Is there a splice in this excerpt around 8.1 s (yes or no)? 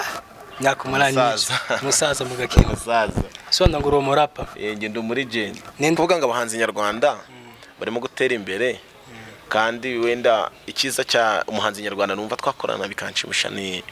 no